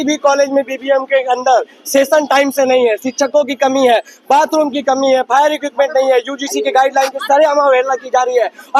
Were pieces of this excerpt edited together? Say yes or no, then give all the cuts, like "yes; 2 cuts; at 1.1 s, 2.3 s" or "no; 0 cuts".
no; 0 cuts